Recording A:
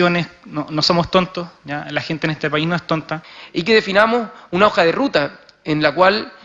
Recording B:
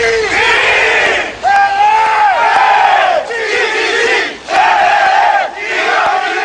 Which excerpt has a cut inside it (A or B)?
A